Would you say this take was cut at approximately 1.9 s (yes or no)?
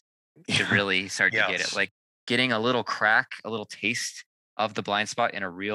yes